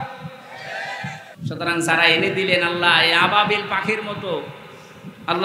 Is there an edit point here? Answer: yes; 1 cut; at 1.3 s

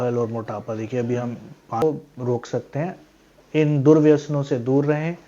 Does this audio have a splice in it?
yes; 1 cut; at 1.8 s

